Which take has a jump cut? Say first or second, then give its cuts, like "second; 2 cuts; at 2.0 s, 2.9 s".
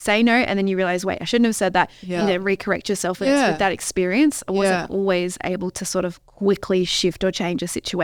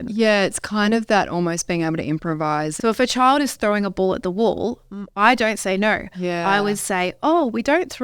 second; 1 cut; at 2.7 s